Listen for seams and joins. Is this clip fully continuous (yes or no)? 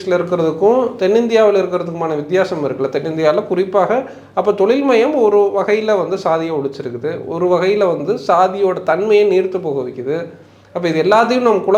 yes